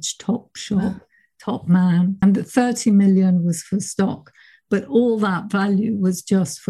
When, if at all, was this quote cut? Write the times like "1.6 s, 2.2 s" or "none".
2.2 s